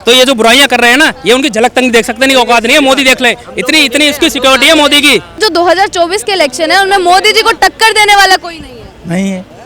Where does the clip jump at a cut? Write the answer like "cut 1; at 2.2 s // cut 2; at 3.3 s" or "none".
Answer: cut 1; at 5.4 s